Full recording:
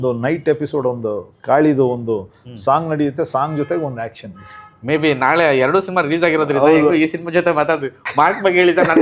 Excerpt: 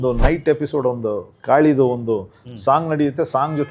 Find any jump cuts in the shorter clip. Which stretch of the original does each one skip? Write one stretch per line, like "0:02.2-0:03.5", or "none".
none